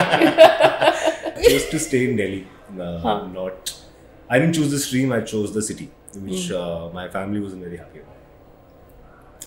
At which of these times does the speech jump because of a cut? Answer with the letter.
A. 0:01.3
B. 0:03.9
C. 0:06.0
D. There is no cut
A